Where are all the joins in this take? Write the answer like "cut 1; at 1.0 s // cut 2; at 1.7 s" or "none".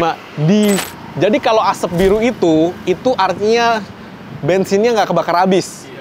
cut 1; at 1.0 s